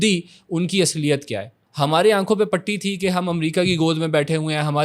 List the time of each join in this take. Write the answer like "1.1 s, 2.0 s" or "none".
1.6 s

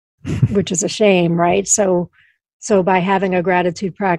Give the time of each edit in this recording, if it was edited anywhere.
none

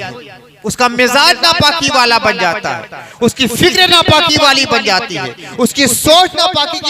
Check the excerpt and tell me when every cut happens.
none

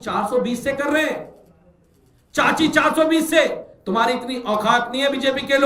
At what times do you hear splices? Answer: 3.7 s

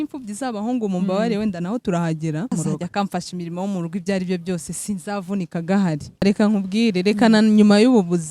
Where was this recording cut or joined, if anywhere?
2.5 s, 6.2 s

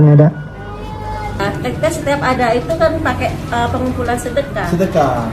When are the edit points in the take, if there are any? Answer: 1.4 s

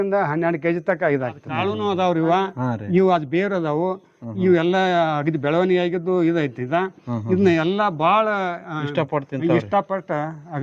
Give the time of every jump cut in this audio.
1.7 s

